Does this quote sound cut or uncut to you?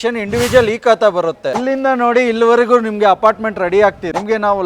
cut